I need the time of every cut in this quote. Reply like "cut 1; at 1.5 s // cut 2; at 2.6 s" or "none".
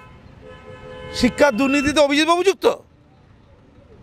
none